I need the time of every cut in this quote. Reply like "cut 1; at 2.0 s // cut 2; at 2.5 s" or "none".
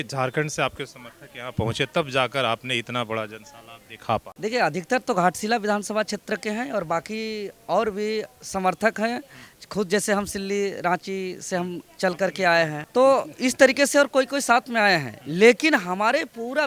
cut 1; at 4.3 s // cut 2; at 12.8 s